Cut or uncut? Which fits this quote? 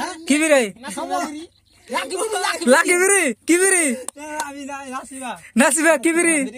uncut